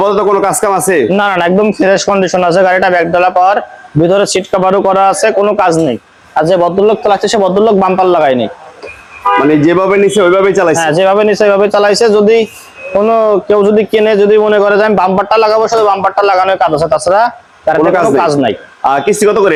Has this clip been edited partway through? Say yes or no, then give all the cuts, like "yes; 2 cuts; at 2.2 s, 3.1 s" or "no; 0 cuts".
no; 0 cuts